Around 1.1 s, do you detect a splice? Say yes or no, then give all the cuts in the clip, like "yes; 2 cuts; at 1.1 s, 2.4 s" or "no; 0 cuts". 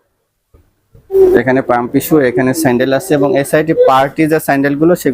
yes; 1 cut; at 1.1 s